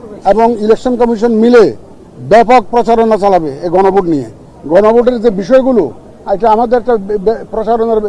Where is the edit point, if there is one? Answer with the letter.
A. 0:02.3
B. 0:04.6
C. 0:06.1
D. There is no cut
D